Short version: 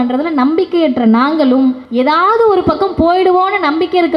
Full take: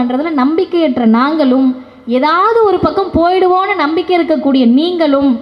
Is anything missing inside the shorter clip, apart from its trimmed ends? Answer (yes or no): yes